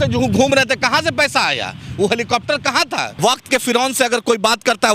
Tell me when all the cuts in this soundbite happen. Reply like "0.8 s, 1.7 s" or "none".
3.1 s